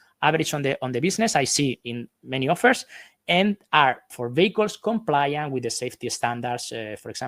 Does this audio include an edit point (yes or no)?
no